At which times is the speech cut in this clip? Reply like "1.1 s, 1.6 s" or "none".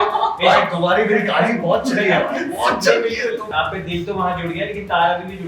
3.5 s